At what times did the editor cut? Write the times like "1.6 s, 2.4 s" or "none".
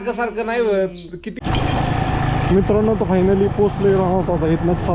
1.4 s